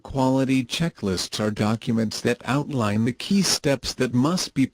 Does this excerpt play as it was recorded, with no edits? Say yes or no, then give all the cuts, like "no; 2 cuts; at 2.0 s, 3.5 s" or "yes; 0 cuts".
no; 1 cut; at 1.2 s